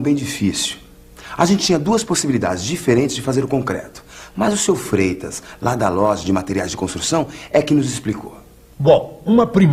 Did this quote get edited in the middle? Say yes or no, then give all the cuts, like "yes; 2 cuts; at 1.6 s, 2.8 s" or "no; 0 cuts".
yes; 1 cut; at 5.5 s